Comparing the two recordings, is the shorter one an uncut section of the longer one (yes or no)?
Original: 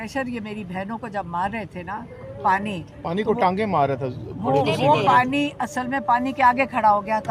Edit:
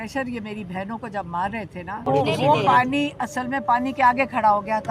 no